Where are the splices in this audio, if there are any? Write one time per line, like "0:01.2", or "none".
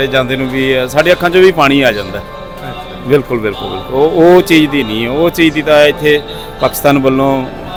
none